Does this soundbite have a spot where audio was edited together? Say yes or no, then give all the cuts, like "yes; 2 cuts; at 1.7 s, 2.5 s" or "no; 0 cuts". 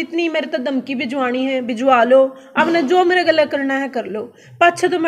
no; 0 cuts